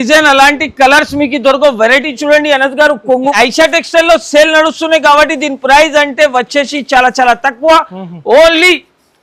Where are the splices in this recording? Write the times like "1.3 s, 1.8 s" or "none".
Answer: 3.2 s